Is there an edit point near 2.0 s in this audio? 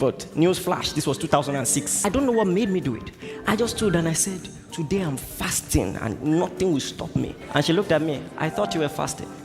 yes; 2 cuts; at 2.0 s, 7.4 s

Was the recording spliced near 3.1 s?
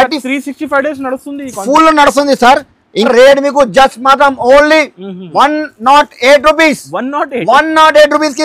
yes; 1 cut; at 3.1 s

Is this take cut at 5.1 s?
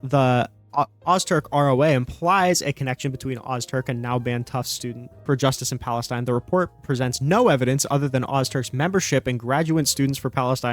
yes; 1 cut; at 5.1 s

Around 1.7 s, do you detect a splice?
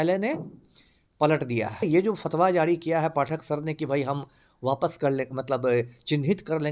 yes; 1 cut; at 1.7 s

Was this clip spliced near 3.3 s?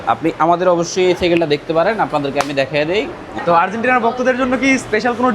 yes; 1 cut; at 3.3 s

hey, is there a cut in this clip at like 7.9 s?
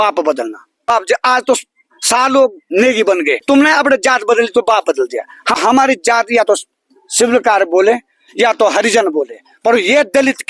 no; 3 cuts; at 0.9 s, 3.4 s, 5.6 s

